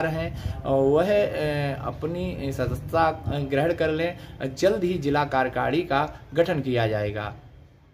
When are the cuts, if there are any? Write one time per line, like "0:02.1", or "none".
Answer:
none